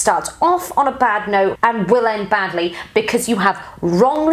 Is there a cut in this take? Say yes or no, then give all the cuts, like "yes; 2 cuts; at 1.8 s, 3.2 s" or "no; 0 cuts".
yes; 1 cut; at 1.6 s